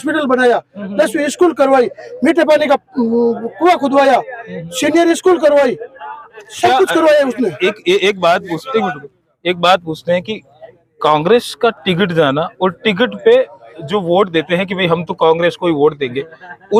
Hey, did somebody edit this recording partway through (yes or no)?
no